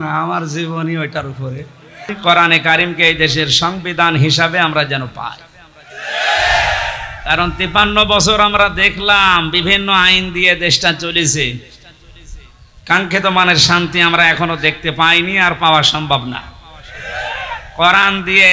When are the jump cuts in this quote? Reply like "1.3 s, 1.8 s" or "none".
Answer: 2.2 s